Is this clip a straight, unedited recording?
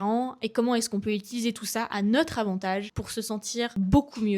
no; 1 cut; at 3.4 s

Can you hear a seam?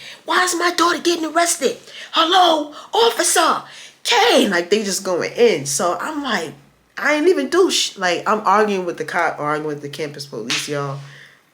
no; 0 cuts

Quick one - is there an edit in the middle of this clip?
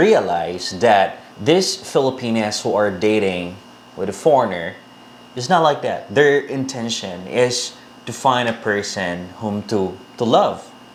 no; 0 cuts

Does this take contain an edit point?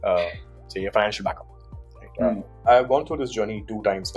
yes; 1 cut; at 2.7 s

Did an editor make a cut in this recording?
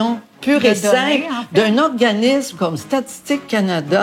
no; 0 cuts

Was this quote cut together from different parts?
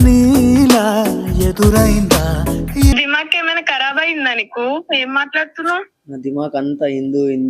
yes; 1 cut; at 2.9 s

